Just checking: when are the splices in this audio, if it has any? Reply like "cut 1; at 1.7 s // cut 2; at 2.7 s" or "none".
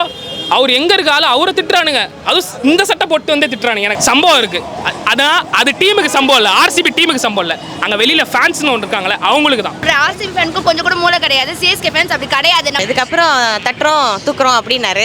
cut 1; at 3.9 s // cut 2; at 9.8 s // cut 3; at 12.8 s

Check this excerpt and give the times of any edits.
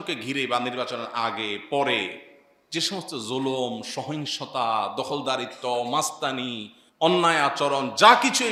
none

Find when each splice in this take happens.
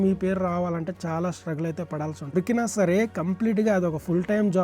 cut 1; at 2.3 s

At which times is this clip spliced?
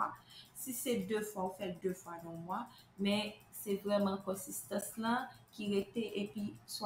none

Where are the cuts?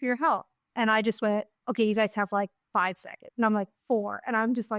none

